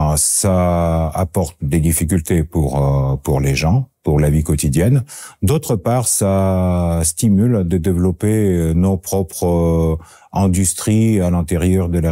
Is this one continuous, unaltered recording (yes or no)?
yes